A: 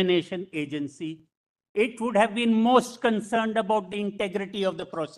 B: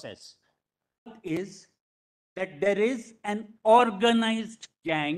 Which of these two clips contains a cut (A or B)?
B